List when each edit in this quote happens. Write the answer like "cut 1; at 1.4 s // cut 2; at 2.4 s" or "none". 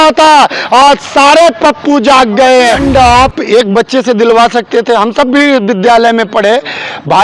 cut 1; at 2.8 s